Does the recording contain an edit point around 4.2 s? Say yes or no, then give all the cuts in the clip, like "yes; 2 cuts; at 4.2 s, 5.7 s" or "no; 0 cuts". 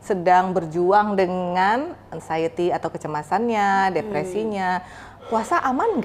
no; 0 cuts